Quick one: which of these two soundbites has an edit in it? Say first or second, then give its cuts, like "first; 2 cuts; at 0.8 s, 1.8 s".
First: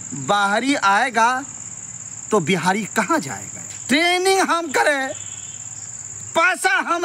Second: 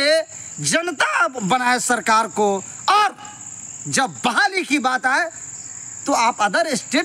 first; 1 cut; at 3.7 s